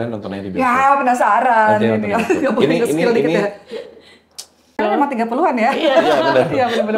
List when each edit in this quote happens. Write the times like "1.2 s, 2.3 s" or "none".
4.7 s